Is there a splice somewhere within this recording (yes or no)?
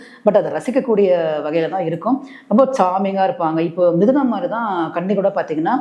no